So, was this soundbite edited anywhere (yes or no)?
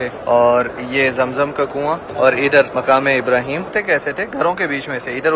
yes